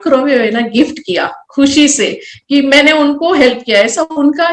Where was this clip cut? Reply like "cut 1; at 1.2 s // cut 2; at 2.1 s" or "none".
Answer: none